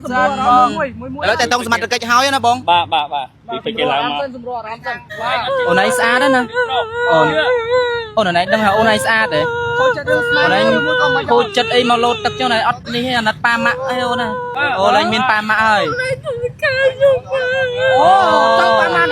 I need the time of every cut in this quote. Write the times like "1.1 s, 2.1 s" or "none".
5.1 s, 14.5 s